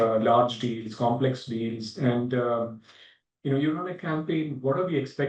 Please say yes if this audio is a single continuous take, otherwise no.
yes